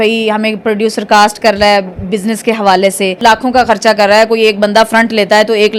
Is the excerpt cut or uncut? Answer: cut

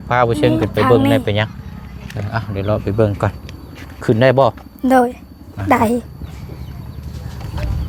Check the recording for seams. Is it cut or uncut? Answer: uncut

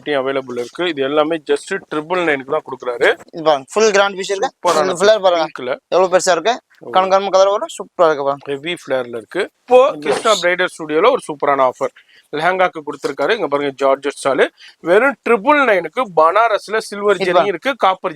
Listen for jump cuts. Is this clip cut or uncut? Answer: cut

